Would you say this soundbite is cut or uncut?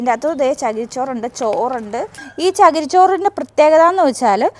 cut